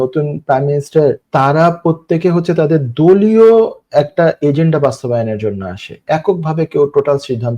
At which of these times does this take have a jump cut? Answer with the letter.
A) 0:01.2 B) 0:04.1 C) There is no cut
A